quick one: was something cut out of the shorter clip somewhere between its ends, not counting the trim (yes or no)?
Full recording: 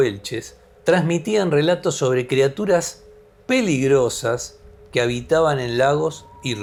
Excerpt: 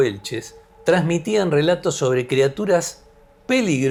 no